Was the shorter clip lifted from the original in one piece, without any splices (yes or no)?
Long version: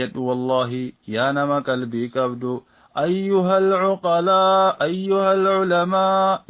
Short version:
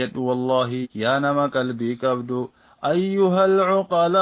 no